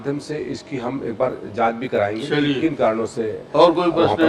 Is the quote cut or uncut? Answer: uncut